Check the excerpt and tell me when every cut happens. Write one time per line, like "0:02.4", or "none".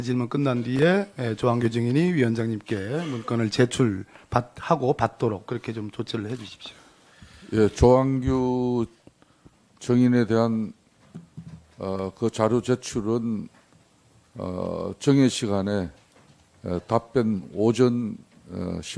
none